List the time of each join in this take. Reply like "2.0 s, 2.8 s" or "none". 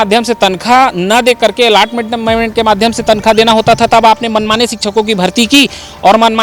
none